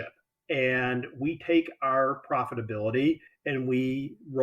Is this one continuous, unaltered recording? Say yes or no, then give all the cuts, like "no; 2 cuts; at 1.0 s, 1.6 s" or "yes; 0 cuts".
no; 1 cut; at 3.3 s